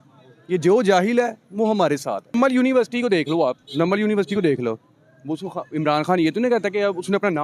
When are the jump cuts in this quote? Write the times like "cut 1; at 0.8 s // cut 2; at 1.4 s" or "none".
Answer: cut 1; at 2.3 s